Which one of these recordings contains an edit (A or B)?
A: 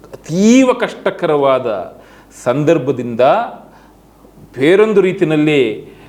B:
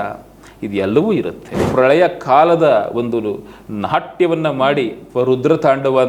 B